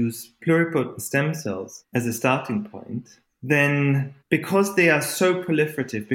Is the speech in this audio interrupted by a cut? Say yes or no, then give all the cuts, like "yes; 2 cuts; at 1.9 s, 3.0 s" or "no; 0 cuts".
yes; 2 cuts; at 1.7 s, 4.1 s